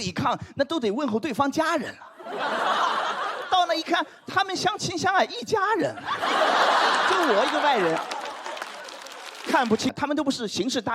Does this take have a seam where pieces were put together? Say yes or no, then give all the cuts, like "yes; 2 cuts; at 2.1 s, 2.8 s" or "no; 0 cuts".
yes; 1 cut; at 9.9 s